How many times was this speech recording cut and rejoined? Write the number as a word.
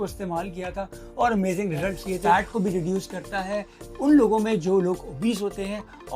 one